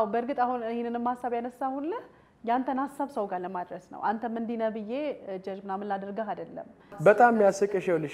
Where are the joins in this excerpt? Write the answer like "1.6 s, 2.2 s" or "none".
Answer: 7.0 s